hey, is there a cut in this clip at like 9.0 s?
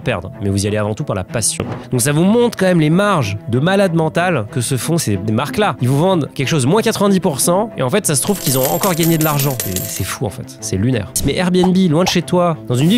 no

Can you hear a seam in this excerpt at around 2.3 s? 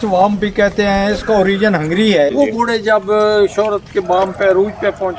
yes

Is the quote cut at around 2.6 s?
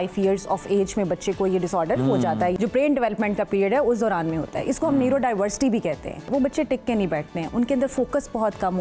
yes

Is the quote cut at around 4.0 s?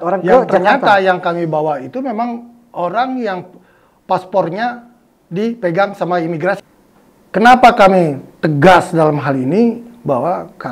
no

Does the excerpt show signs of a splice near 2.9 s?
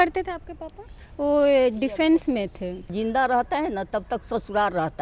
yes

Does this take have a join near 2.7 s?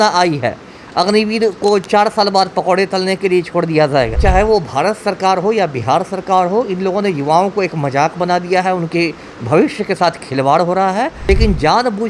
no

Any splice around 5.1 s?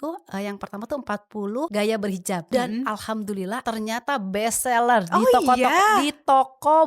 no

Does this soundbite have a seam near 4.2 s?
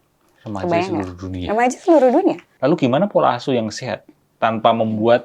no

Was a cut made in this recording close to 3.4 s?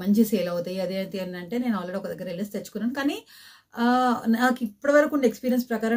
no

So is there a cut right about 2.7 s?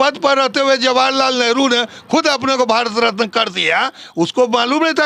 no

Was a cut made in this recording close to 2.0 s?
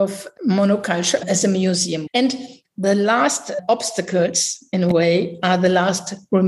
yes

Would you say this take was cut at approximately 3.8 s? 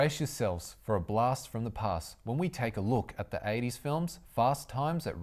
yes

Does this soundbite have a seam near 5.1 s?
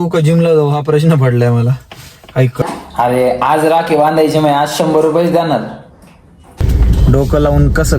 no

